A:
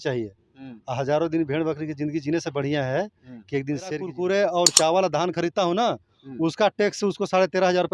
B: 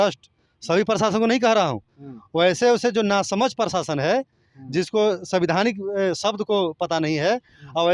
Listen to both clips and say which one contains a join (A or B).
A